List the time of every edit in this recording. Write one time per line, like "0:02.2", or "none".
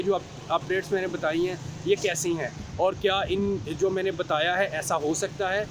none